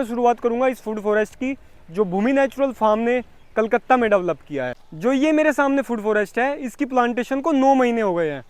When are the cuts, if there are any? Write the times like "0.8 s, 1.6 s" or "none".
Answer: 4.8 s